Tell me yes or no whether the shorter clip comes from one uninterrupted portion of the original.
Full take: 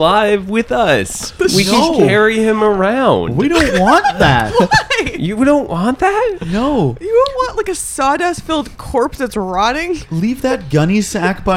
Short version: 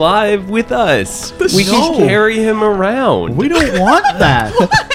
yes